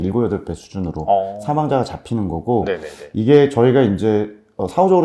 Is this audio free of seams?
yes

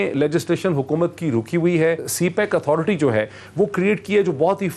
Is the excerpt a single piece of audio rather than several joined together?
no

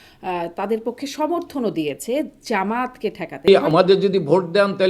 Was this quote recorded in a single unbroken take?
no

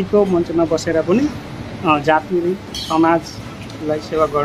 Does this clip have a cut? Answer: no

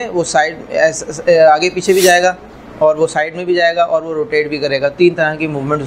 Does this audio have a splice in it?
no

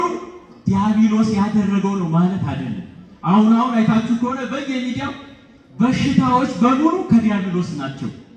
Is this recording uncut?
yes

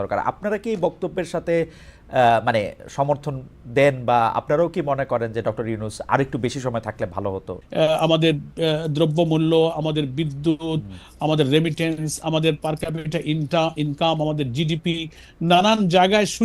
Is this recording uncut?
no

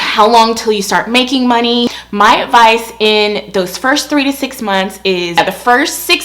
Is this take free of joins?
no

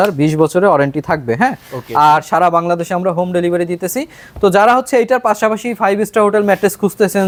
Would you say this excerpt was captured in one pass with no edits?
yes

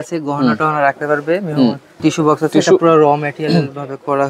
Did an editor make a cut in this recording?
yes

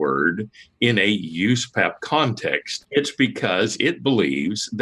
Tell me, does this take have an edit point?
yes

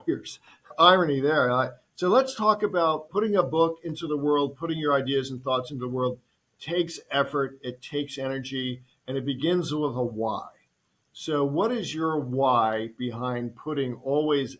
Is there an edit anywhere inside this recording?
yes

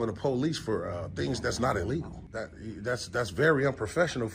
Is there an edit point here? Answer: yes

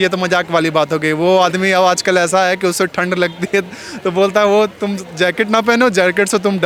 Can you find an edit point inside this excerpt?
no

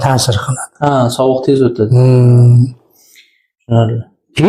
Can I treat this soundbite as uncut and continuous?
yes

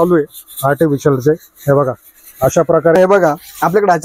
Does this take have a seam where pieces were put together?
yes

